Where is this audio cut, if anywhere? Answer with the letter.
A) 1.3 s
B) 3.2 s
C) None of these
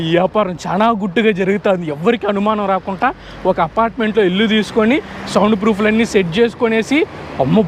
C